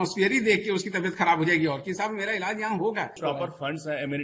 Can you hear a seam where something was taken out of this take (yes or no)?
yes